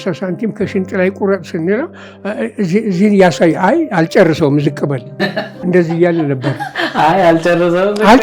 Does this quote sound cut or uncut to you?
uncut